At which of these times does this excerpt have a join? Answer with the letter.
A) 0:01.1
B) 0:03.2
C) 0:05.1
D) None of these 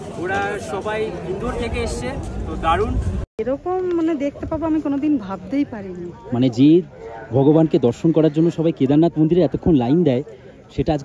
B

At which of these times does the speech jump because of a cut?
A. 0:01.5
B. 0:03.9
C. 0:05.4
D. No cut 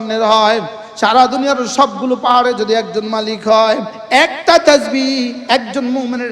B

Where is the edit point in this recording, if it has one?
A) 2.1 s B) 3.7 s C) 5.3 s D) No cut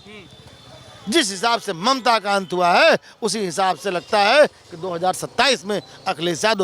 D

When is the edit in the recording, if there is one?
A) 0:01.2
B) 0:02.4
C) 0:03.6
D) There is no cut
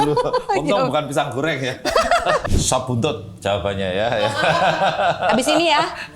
B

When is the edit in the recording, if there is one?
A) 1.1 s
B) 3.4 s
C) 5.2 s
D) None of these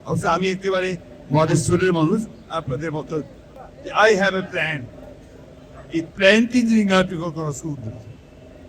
B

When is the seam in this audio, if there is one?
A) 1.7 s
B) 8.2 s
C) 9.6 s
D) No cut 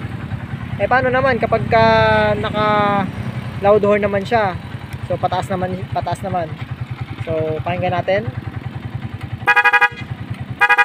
D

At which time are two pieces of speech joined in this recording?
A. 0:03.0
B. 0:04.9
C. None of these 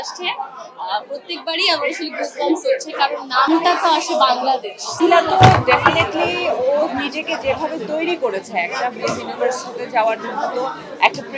B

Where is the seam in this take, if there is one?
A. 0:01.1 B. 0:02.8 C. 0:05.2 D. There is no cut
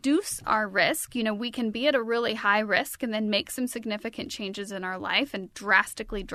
D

